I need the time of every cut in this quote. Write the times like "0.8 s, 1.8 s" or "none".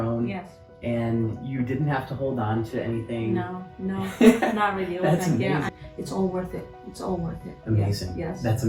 5.7 s